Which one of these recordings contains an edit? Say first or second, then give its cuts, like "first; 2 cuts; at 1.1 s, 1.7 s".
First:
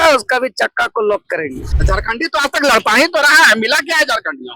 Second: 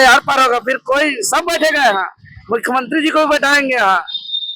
first; 1 cut; at 1.7 s